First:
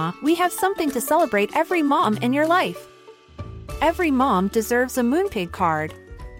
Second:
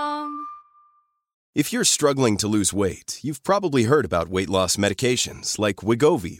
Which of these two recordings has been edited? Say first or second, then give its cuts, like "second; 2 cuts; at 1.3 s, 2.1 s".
second; 1 cut; at 1.4 s